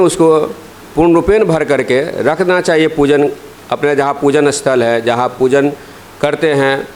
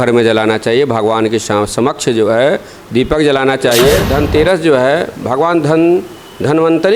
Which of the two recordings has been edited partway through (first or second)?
second